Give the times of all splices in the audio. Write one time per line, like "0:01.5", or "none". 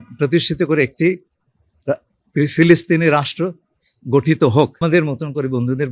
0:04.8